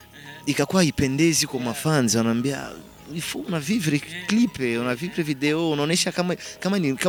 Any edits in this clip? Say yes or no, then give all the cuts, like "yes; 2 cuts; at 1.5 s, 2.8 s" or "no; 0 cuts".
no; 0 cuts